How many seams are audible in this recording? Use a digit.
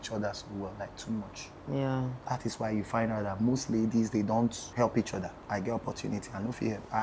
3